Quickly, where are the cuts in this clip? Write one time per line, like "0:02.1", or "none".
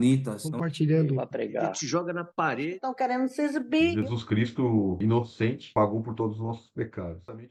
none